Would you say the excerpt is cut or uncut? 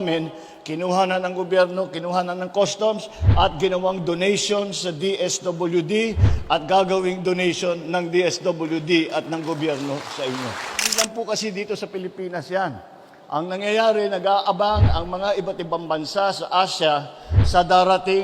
cut